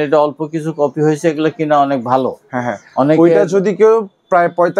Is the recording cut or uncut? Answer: uncut